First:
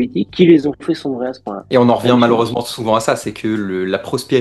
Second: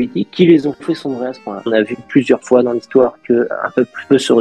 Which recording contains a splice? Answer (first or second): second